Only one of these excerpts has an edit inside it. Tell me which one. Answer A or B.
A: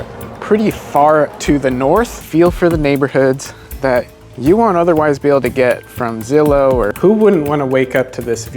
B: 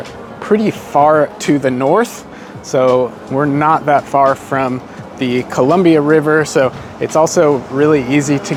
A